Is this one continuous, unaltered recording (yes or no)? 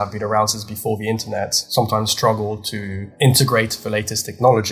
no